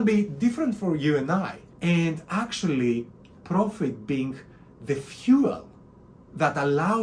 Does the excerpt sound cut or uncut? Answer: cut